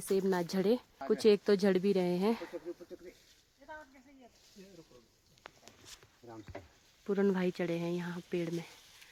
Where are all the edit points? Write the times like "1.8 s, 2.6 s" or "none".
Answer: none